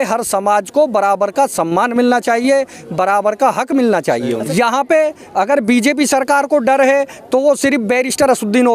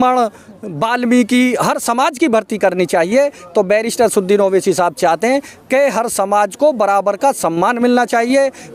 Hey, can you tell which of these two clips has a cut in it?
first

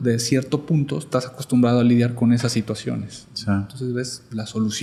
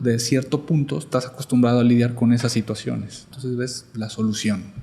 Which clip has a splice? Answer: second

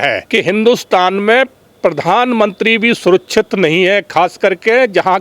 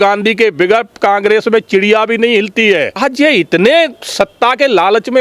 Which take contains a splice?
second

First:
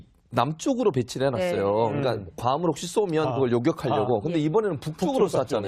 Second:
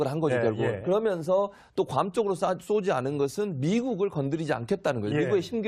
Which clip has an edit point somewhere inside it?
first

